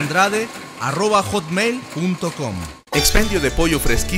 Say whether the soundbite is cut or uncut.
cut